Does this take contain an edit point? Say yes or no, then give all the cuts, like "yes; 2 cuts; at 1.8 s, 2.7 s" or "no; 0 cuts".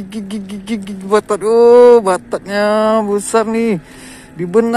no; 0 cuts